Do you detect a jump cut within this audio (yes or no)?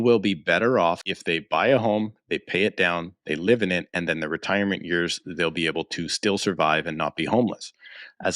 yes